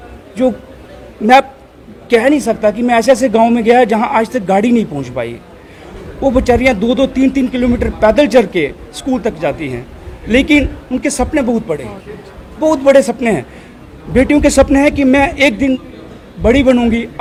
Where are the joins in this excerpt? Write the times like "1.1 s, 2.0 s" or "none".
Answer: none

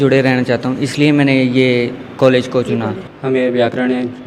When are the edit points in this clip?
3.1 s

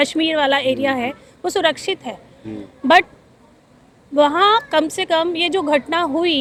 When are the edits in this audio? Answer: none

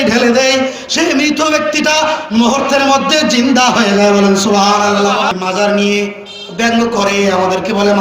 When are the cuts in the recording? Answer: 5.3 s

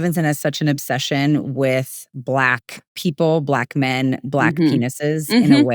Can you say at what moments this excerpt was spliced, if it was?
none

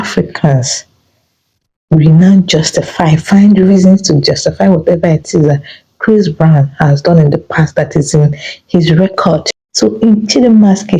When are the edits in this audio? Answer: 9.6 s

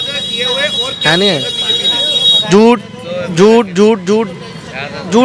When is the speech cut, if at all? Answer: none

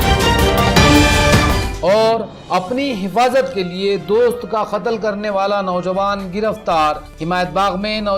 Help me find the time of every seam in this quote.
none

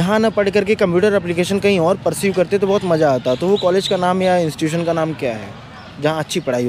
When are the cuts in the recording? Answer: none

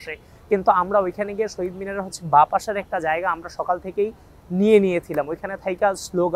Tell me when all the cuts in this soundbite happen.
none

